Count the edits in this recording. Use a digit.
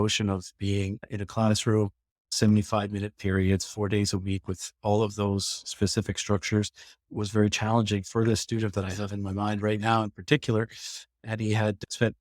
2